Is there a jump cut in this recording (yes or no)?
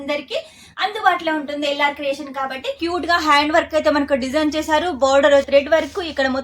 yes